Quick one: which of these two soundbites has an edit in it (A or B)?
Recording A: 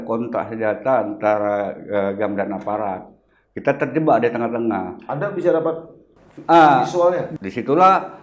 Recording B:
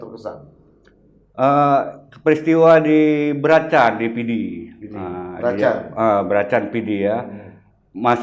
A